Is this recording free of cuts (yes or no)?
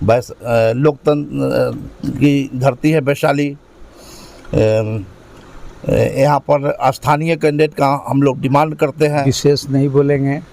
no